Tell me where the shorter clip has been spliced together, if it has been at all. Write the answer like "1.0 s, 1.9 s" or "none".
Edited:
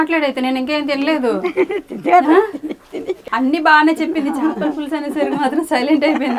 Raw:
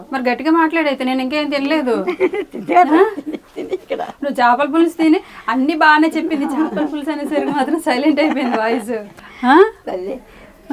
3.2 s